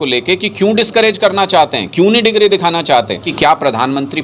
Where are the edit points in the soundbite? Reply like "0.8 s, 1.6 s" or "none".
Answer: 3.3 s